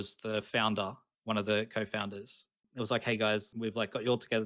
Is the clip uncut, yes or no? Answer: no